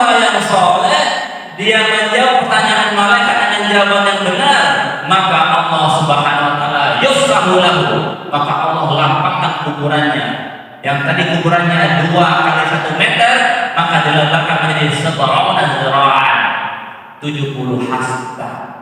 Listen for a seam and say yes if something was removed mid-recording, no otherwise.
no